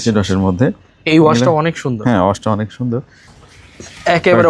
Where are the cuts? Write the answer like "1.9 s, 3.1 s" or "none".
3.3 s